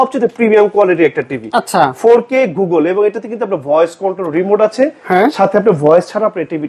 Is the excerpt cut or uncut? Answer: uncut